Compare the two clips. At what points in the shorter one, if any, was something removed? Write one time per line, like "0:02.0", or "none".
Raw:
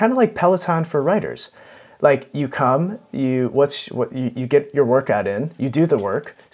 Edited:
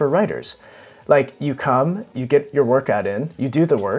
0:02.1